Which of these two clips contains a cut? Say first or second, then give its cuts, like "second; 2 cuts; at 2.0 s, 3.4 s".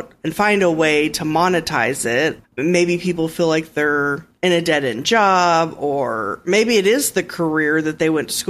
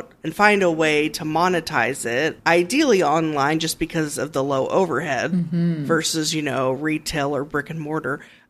first; 1 cut; at 2.4 s